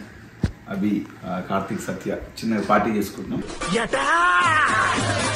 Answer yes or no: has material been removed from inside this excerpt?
yes